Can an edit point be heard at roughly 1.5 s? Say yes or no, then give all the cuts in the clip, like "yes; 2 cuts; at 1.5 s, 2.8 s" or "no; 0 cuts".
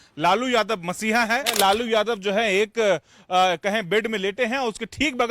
yes; 1 cut; at 1.5 s